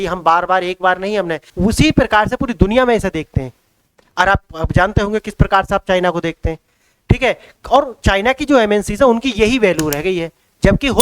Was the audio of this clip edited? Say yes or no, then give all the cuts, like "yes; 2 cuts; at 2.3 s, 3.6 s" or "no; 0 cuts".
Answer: yes; 1 cut; at 1.4 s